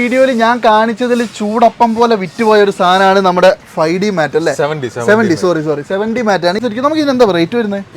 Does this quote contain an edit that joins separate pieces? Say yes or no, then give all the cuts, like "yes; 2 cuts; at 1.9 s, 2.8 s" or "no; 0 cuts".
yes; 1 cut; at 6.6 s